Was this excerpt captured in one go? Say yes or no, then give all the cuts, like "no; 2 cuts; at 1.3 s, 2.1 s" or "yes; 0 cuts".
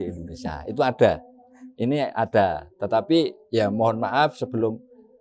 yes; 0 cuts